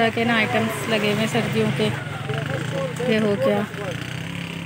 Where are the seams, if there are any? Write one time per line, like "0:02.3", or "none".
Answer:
none